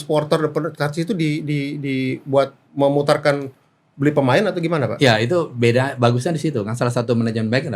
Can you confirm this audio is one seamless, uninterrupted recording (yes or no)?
yes